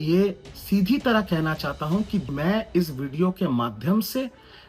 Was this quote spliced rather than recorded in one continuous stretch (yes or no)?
yes